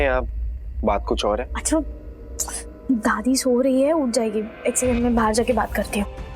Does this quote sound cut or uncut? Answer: cut